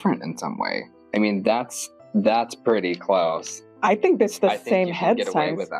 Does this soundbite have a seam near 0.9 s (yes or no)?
yes